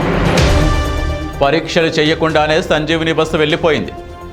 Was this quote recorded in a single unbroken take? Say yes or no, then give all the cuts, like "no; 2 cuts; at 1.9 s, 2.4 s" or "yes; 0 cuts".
yes; 0 cuts